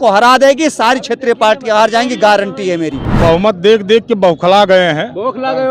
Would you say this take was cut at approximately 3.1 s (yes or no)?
yes